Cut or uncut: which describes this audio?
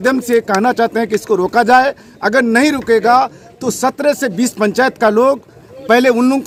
uncut